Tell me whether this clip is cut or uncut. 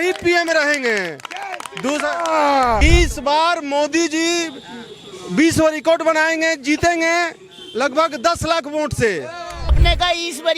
cut